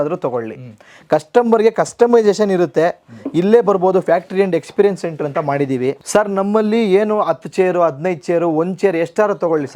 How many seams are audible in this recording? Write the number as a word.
one